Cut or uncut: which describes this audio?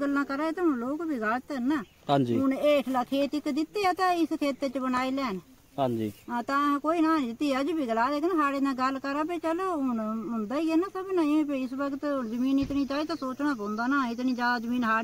uncut